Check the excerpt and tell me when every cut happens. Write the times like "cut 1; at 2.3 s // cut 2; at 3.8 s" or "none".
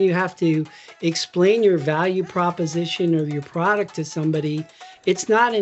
none